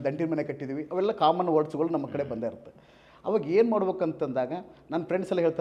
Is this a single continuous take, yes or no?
yes